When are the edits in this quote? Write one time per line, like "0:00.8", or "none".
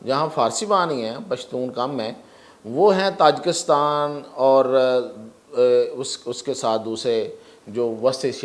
none

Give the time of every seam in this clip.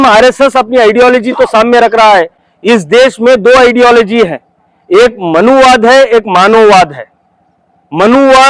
none

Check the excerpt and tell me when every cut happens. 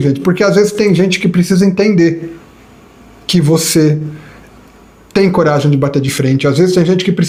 none

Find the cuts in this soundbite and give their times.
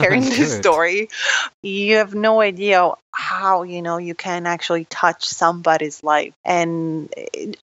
0:01.5

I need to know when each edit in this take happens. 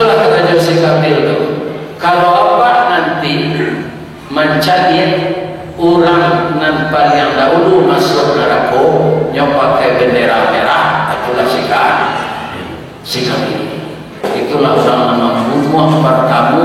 0:14.2

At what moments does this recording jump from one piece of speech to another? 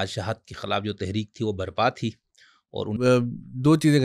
0:02.9

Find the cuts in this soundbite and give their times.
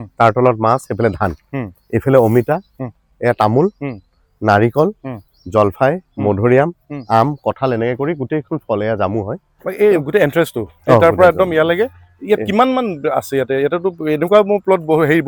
none

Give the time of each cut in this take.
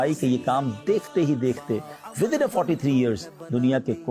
none

